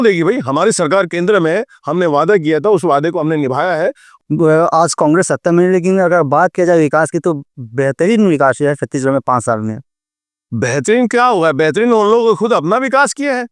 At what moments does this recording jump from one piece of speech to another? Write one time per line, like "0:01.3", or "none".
0:04.1